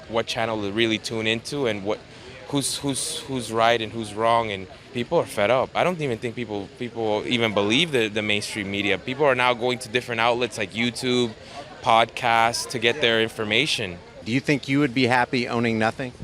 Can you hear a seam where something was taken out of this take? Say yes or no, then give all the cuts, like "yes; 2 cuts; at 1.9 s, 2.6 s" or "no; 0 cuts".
yes; 2 cuts; at 4.9 s, 14.2 s